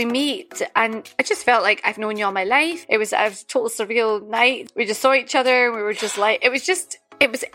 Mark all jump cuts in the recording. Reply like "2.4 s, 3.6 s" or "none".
1.0 s, 2.8 s, 4.7 s